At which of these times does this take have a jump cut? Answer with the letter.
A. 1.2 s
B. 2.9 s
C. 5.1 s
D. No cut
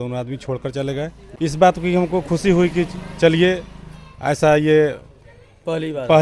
A